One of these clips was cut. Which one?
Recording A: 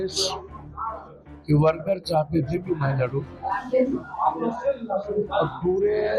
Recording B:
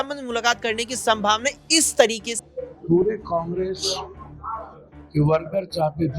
B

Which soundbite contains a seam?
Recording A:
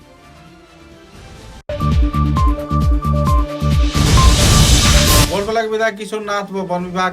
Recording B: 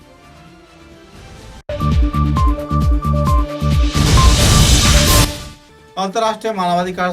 A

